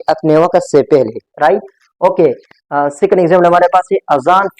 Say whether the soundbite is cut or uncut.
uncut